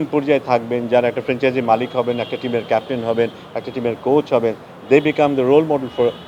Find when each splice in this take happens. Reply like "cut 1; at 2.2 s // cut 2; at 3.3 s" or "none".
none

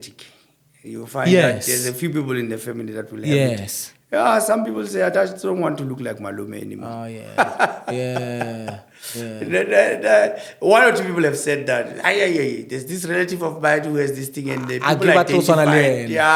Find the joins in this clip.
none

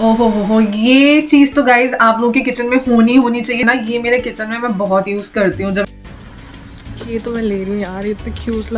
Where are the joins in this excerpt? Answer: cut 1; at 3.6 s // cut 2; at 5.9 s

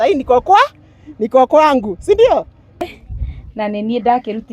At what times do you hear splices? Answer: cut 1; at 2.9 s

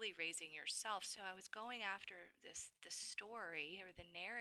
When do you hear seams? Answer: cut 1; at 1.1 s

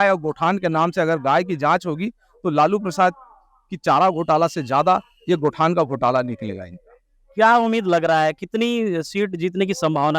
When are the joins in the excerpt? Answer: none

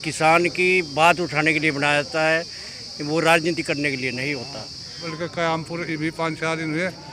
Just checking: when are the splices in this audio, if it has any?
cut 1; at 5.1 s

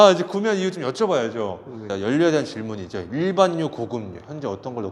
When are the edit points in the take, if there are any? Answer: cut 1; at 1.9 s

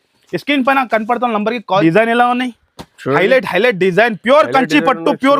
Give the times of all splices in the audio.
cut 1; at 1.8 s

